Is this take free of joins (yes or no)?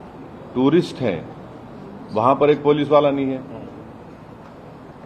yes